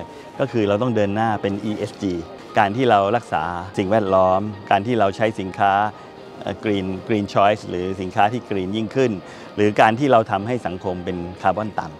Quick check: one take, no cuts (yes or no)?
no